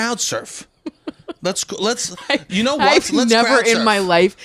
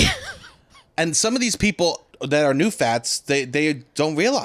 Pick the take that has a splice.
second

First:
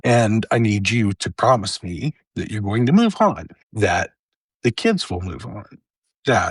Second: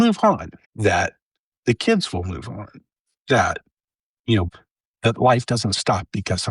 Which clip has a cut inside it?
second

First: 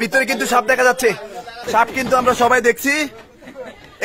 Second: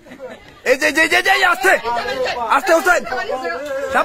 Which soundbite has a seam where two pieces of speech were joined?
first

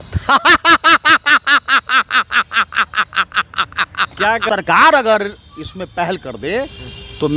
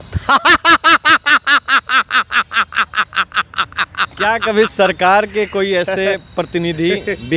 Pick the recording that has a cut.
first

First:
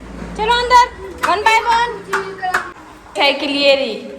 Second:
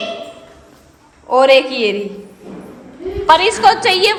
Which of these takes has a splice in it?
first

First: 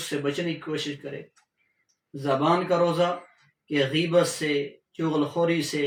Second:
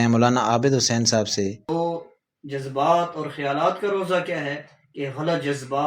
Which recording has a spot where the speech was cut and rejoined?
second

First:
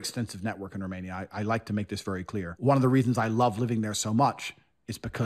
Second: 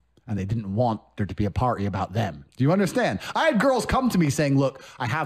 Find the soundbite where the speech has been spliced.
first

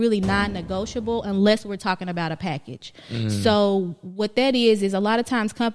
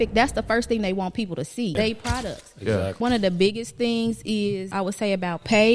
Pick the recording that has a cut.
second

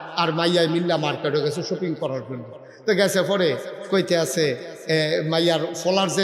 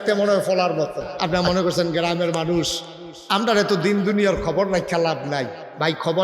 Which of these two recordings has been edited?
second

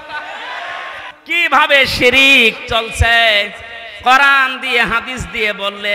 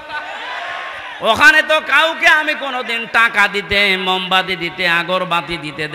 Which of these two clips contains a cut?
first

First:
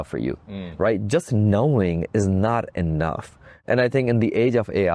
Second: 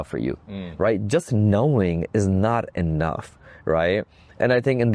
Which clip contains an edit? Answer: first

